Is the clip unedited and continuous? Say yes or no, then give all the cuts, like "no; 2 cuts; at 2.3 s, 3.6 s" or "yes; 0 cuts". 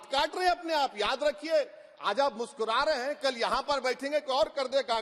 yes; 0 cuts